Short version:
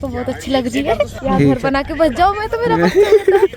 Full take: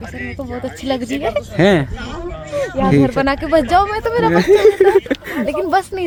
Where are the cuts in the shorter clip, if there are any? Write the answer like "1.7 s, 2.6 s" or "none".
1.1 s